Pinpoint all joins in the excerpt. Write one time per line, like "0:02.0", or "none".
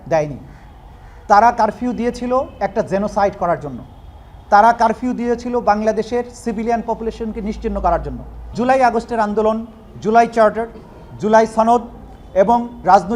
0:08.5